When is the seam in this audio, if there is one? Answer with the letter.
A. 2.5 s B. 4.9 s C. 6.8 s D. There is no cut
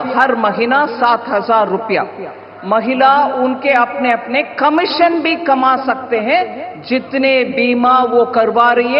A